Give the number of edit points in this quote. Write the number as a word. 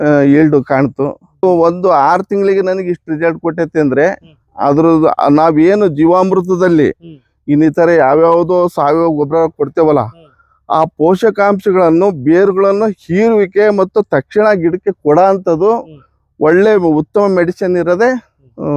one